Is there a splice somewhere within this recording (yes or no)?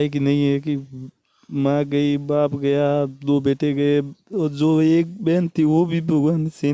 no